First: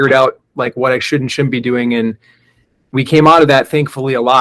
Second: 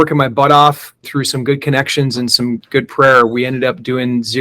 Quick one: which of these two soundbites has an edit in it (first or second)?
second